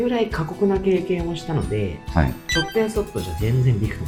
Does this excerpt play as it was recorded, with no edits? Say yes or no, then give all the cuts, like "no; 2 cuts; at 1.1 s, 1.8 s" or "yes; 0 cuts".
yes; 0 cuts